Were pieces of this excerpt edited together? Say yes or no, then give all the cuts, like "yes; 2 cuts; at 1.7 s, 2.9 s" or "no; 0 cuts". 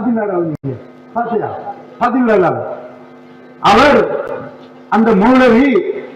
no; 0 cuts